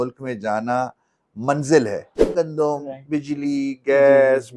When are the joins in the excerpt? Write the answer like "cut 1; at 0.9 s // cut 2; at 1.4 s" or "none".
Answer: cut 1; at 2.2 s